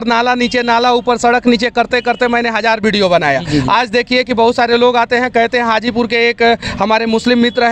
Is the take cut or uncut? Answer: uncut